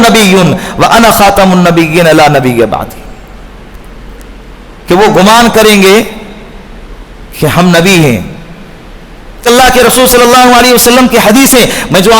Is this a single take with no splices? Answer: no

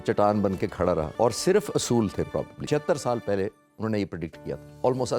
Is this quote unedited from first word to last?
no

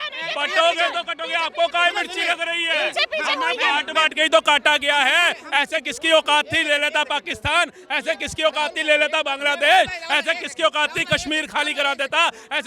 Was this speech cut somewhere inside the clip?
no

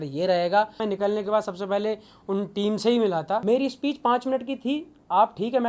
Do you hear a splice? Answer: yes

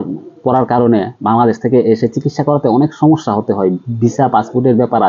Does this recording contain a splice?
no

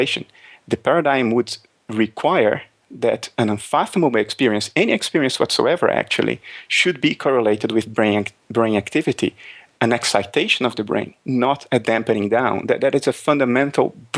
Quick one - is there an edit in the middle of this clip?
no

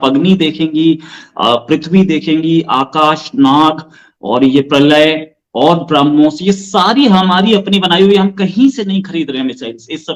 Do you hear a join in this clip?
no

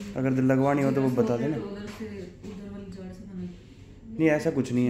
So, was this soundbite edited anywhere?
no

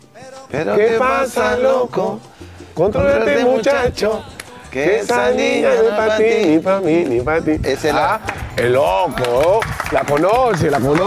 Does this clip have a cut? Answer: no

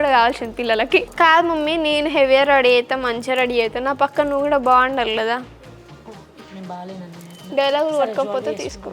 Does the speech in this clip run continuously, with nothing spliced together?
no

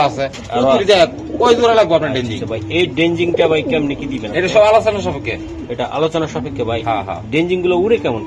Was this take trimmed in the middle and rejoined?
no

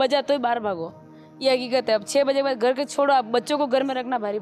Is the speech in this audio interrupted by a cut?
no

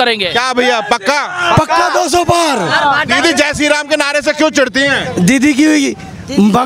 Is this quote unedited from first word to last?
yes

